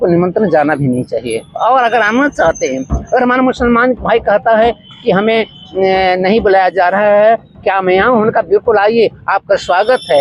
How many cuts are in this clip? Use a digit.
0